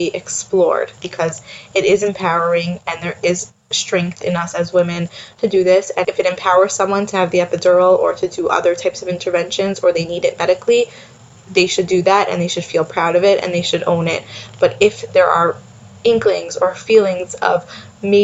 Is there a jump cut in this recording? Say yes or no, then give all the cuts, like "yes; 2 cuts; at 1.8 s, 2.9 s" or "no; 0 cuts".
yes; 2 cuts; at 0.9 s, 6.0 s